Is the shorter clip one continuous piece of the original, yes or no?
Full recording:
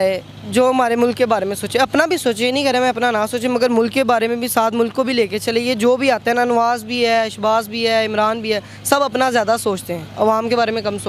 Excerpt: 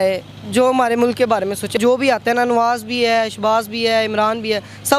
no